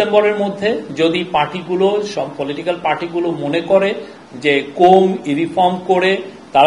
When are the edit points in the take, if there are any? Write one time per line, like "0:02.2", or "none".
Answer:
none

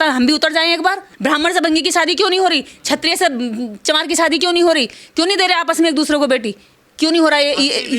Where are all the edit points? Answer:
none

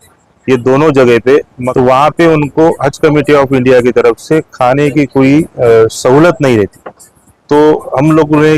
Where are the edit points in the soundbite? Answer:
0:01.6

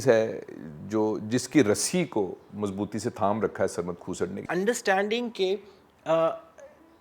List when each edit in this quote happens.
0:04.4

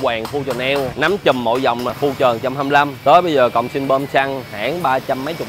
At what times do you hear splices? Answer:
0:00.9
0:01.9
0:02.9

